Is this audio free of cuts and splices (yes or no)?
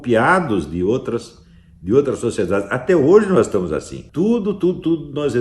no